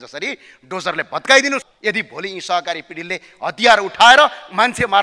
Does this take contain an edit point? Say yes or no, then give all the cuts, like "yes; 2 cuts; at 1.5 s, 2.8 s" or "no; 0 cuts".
yes; 1 cut; at 1.7 s